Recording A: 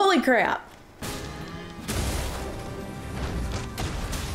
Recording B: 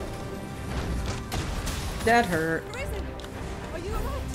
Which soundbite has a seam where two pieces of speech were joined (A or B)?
A